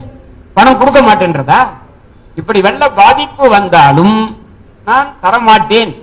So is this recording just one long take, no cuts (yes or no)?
yes